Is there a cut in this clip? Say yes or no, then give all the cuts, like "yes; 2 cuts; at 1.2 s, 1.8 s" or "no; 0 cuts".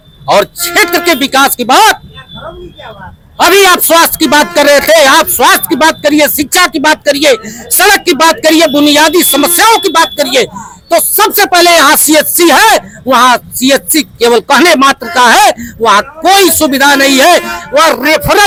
no; 0 cuts